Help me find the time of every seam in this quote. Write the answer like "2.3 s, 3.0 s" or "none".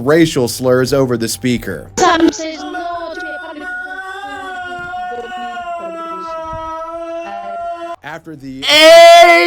2.3 s